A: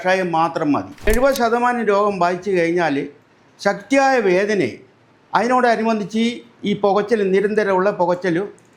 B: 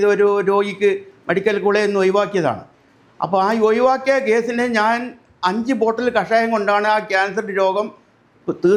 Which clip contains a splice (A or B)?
A